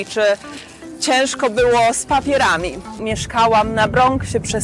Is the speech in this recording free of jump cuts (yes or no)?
no